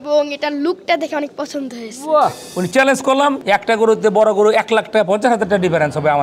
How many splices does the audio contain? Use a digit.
2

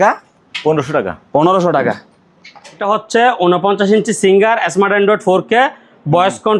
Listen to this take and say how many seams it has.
1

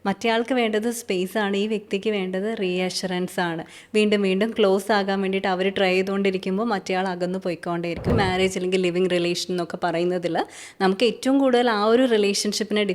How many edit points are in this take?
1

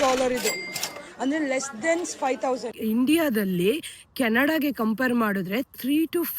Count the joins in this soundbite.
1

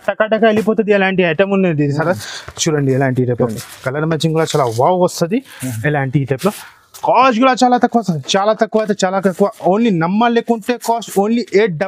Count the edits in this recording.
0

